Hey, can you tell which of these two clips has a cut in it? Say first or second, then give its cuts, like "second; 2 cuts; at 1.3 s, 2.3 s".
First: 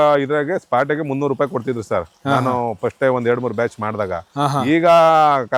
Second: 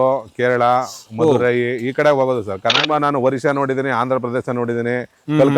second; 1 cut; at 2.8 s